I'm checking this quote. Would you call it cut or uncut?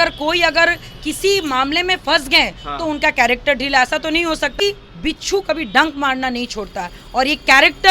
cut